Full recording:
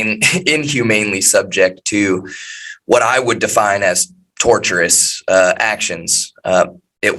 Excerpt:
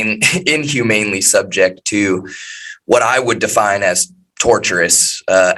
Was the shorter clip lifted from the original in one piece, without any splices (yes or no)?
yes